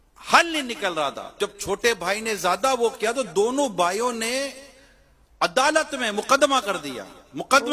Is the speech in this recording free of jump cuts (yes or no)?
no